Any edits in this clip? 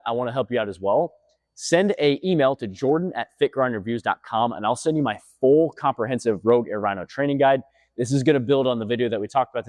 no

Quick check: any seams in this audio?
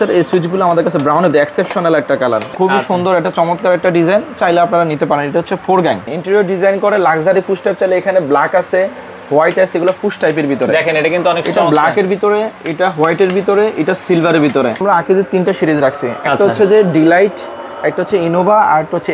yes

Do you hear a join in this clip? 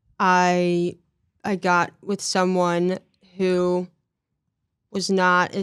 no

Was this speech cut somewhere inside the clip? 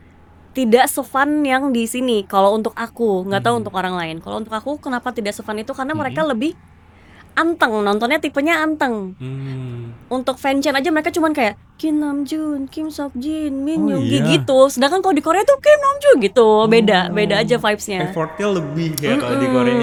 no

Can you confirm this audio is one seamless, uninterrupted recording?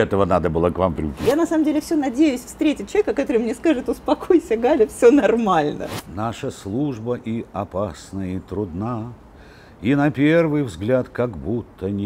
no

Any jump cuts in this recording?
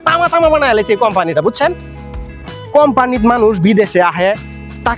no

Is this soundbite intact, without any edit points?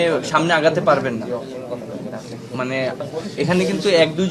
yes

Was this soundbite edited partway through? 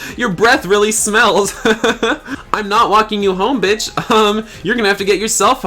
yes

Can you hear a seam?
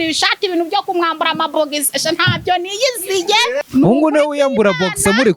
yes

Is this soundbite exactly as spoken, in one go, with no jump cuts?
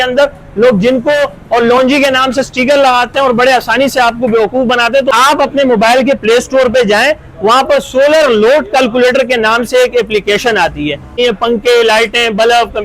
no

